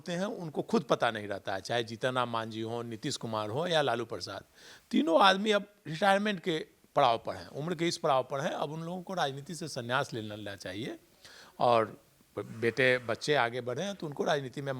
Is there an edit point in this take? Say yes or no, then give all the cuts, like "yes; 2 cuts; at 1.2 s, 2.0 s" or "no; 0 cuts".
no; 0 cuts